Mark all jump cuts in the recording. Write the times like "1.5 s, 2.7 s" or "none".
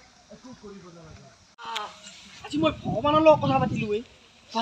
1.6 s